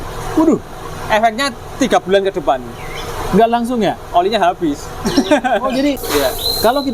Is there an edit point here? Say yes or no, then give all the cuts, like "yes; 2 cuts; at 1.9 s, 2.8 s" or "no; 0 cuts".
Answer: yes; 1 cut; at 6.0 s